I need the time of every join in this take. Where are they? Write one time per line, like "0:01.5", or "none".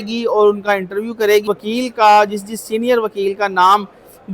0:01.5